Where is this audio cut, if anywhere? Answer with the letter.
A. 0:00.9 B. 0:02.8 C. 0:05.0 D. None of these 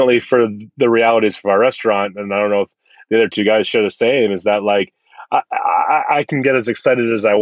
D